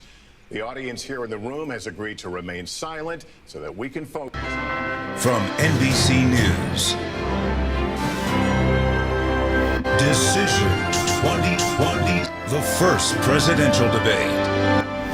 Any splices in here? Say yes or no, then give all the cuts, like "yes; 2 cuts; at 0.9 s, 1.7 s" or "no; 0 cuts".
yes; 1 cut; at 4.3 s